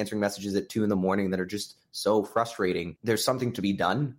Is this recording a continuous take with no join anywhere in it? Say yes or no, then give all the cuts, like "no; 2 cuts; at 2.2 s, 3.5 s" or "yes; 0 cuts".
no; 1 cut; at 2.9 s